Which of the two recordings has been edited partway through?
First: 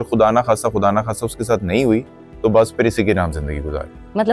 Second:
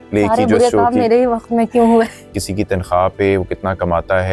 second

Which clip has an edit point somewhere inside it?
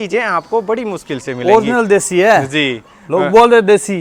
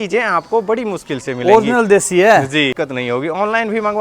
second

